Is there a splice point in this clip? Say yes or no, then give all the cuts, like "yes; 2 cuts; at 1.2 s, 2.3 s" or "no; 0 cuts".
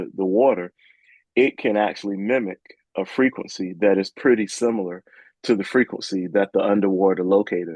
no; 0 cuts